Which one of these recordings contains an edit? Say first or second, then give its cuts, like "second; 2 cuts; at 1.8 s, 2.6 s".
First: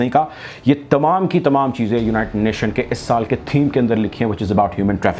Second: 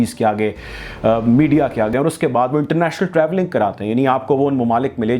second; 1 cut; at 1.9 s